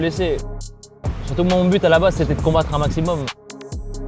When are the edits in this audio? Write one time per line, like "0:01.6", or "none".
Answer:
0:01.0